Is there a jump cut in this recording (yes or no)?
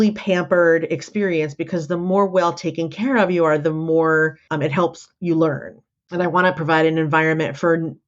no